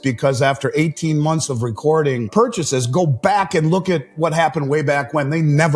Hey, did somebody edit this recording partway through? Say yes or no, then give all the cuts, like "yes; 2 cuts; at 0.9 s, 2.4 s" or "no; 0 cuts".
yes; 1 cut; at 2.3 s